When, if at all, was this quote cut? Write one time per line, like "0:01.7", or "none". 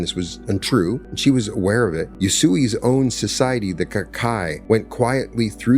0:01.1
0:02.1
0:04.6